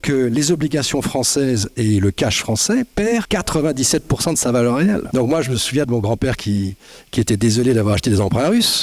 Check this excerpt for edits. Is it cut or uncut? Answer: cut